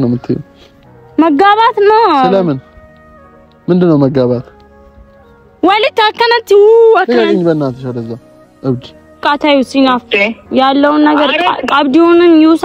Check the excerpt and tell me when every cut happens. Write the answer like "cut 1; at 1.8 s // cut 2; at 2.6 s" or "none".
cut 1; at 9.2 s